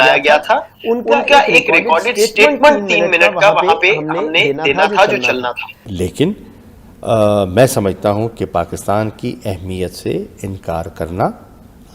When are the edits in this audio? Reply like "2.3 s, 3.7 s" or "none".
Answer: 5.9 s